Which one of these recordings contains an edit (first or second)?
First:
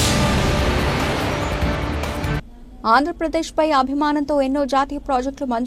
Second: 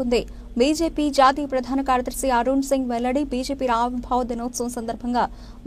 first